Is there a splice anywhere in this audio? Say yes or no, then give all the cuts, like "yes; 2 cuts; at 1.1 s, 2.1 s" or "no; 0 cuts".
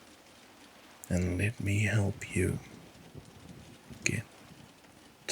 yes; 1 cut; at 1.1 s